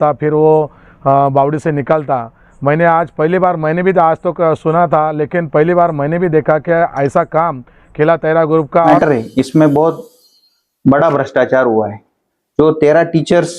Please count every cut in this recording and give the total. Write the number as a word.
one